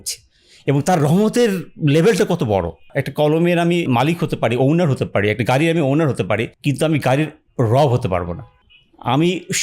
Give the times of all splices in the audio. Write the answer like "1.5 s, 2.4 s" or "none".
2.9 s, 3.9 s, 8.7 s